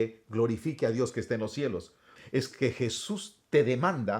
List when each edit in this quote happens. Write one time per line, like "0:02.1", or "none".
0:02.1